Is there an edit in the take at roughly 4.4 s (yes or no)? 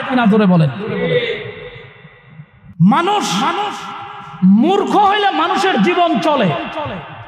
no